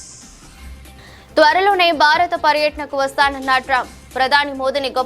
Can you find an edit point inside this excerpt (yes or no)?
no